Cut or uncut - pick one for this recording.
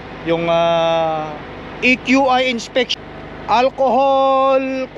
cut